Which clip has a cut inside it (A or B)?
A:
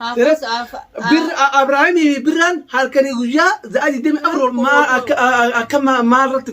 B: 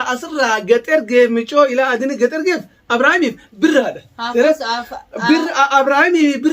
A